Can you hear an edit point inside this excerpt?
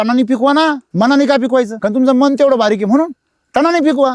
yes; 2 cuts; at 0.8 s, 1.7 s

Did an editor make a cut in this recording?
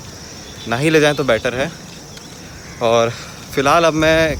no; 0 cuts

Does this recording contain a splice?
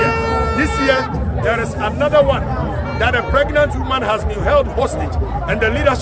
no; 0 cuts

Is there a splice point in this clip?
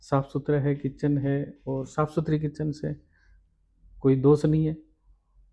no; 0 cuts

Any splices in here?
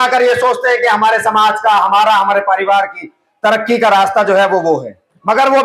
no; 0 cuts

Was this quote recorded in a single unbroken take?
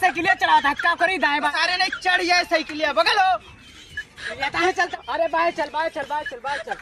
no; 2 cuts; at 1.5 s, 4.9 s

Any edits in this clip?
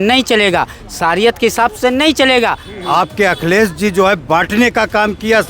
yes; 1 cut; at 2.7 s

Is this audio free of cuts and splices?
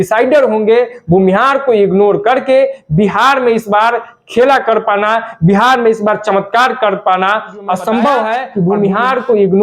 no; 1 cut; at 8.5 s

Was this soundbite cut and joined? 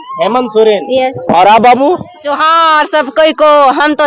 no; 0 cuts

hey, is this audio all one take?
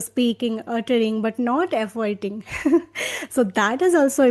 yes; 0 cuts

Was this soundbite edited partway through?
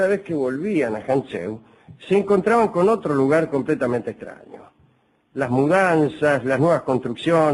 no; 0 cuts

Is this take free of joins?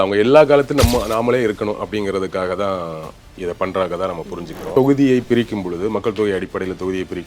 no; 1 cut; at 4.6 s

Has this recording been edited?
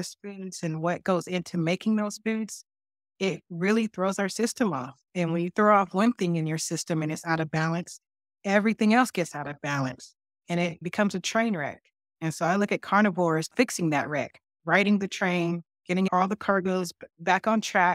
yes; 4 cuts; at 10.8 s, 13.5 s, 16.1 s, 17.0 s

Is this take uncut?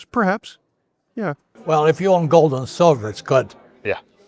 no; 1 cut; at 1.0 s

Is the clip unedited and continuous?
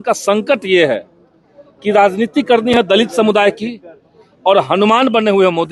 yes; 0 cuts

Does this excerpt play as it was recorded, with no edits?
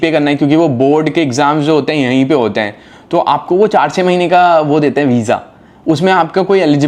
yes; 0 cuts

